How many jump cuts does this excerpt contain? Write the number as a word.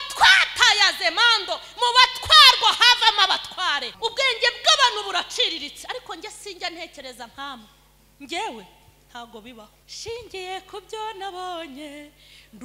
two